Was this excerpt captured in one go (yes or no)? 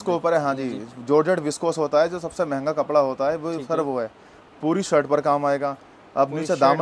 yes